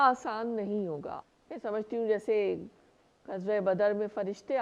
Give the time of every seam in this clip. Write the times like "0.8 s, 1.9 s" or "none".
1.1 s